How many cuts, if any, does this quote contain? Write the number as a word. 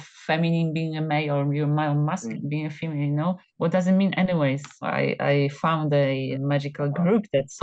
four